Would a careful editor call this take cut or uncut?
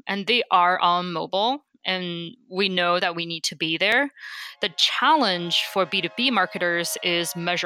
uncut